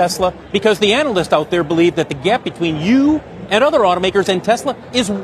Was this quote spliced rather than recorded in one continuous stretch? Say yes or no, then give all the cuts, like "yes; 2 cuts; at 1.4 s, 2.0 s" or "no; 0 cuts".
no; 0 cuts